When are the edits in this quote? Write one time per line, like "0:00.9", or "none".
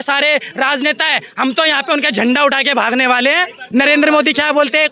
0:03.6